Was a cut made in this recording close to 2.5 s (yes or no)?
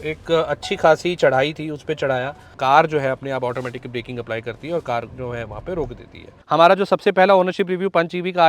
yes